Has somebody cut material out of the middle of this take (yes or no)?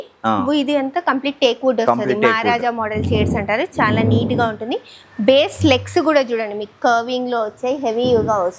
no